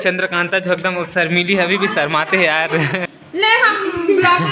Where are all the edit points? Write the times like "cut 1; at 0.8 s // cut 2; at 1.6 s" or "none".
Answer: cut 1; at 3.1 s